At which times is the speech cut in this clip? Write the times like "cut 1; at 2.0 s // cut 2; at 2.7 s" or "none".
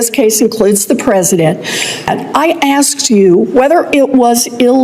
cut 1; at 2.1 s